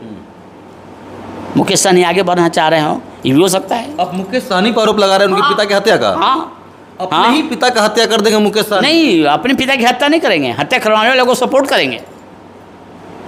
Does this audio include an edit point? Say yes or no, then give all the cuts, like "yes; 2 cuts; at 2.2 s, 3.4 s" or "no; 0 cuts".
no; 0 cuts